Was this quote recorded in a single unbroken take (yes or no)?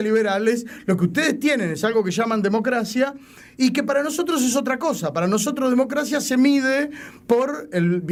yes